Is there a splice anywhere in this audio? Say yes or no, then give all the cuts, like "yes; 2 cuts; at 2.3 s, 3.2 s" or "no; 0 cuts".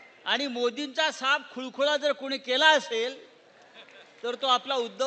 no; 0 cuts